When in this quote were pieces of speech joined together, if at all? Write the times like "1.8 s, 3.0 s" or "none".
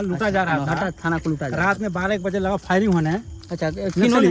none